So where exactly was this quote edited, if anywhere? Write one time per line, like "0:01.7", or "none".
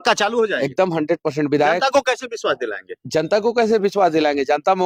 none